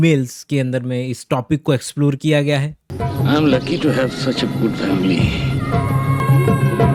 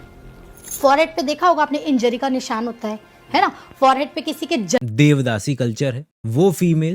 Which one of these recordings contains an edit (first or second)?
second